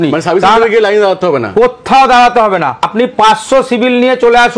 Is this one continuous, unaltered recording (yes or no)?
no